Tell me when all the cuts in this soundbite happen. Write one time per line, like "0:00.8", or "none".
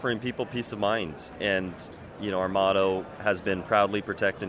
0:01.3

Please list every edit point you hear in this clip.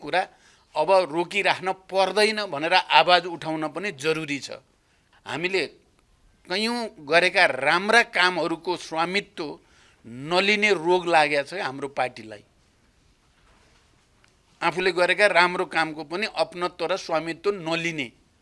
none

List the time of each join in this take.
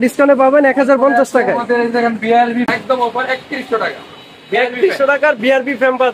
0:02.7

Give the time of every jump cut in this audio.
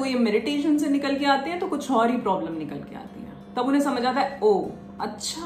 none

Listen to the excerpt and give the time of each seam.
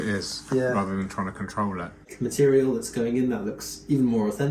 0:02.0

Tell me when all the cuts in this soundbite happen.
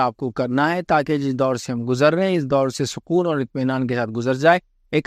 none

